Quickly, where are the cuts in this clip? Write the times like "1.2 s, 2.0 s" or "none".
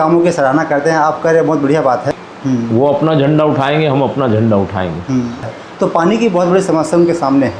2.1 s, 5.6 s